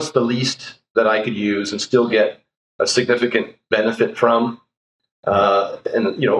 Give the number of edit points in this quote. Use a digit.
0